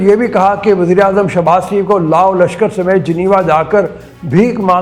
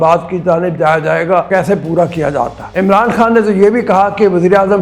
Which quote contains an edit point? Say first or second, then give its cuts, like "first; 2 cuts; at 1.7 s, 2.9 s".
second; 2 cuts; at 1.5 s, 2.6 s